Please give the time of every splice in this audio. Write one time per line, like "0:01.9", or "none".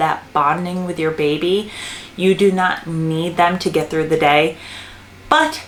none

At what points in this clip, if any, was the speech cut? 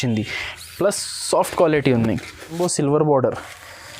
0:02.6

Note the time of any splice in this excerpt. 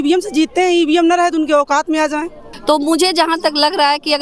0:02.5

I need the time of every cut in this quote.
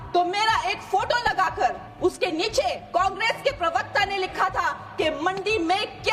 0:01.9
0:02.8

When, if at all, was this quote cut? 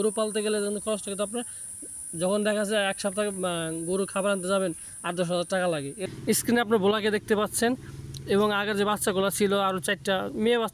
0:06.1

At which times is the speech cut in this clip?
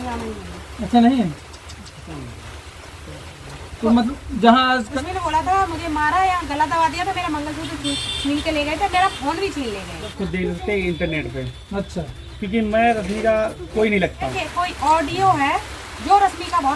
0:04.9
0:10.1
0:14.4

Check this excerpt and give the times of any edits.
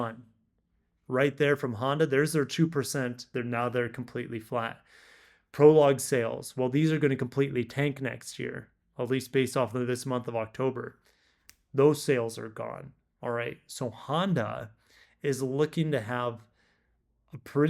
0:03.2

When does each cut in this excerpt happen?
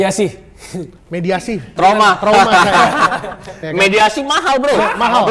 0:01.7

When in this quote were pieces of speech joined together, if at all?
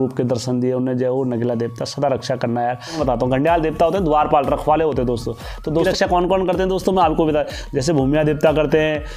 0:03.0
0:05.8

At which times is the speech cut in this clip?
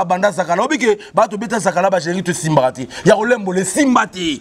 none

